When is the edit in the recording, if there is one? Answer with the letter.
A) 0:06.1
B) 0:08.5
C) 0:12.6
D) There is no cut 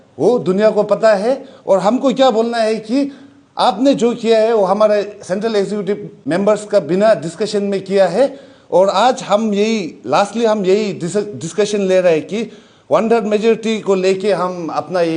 A